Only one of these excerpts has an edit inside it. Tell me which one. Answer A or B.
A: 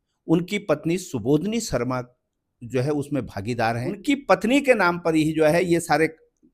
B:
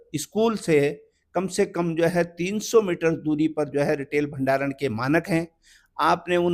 A